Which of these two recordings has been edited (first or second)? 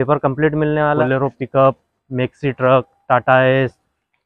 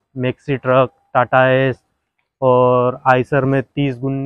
first